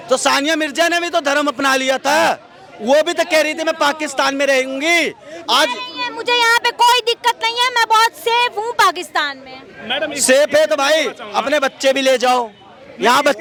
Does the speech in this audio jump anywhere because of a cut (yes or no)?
no